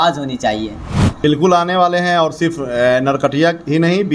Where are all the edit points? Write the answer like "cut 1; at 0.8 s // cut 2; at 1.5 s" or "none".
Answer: cut 1; at 1.2 s